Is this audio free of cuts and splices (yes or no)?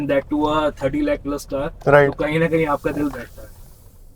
yes